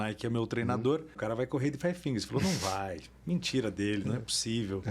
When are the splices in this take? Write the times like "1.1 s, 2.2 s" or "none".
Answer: 1.2 s